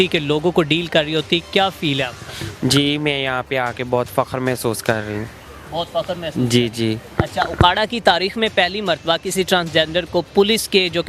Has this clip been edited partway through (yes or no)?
no